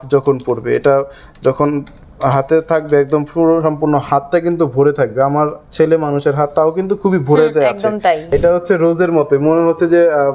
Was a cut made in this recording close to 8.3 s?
yes; 1 cut; at 8.3 s

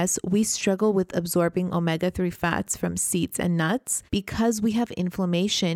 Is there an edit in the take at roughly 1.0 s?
no; 1 cut; at 4.0 s

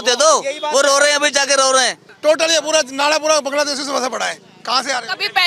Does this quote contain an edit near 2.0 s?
yes; 1 cut; at 2.0 s

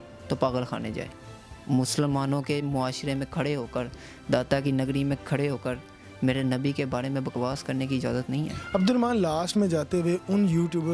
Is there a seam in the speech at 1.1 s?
no; 0 cuts

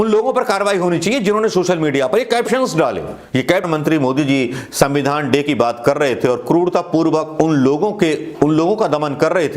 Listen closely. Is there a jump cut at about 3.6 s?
yes; 1 cut; at 3.6 s

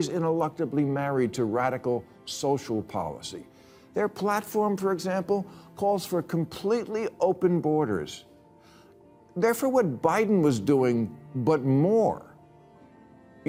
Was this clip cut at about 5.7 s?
no; 0 cuts

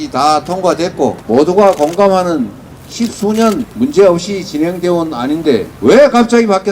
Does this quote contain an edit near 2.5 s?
no; 3 cuts; at 1.2 s, 3.7 s, 5.7 s

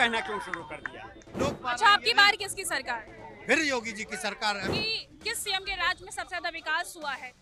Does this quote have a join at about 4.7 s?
yes; 2 cuts; at 1.3 s, 4.7 s

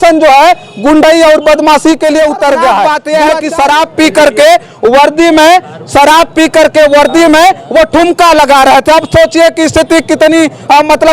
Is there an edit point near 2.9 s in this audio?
yes; 1 cut; at 2.9 s

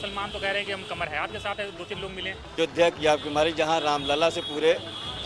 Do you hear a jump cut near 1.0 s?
no; 1 cut; at 2.6 s

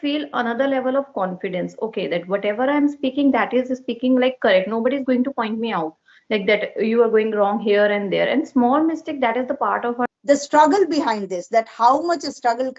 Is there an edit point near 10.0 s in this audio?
yes; 1 cut; at 10.0 s

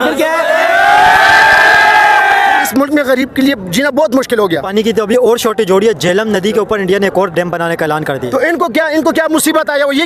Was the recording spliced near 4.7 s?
yes; 2 cuts; at 2.7 s, 4.7 s

